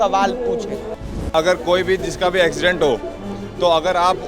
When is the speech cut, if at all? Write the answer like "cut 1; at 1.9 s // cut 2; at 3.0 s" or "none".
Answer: cut 1; at 1.2 s